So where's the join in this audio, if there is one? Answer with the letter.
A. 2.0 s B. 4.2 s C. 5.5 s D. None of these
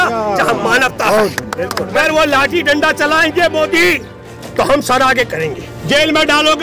A